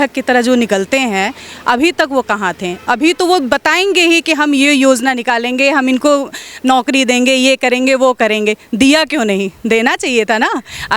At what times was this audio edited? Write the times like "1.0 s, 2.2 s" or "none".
none